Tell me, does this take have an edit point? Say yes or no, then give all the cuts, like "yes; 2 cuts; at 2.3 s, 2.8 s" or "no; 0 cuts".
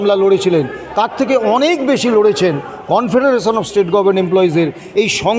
no; 0 cuts